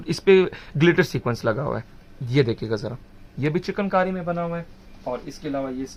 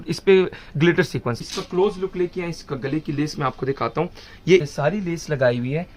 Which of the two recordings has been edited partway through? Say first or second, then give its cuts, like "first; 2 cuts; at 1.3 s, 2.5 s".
second; 2 cuts; at 1.4 s, 4.7 s